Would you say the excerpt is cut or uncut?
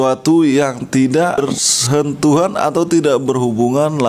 cut